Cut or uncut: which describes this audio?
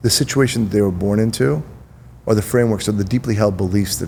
uncut